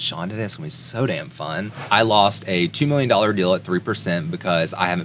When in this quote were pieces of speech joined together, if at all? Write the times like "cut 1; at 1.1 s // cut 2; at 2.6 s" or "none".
cut 1; at 1.8 s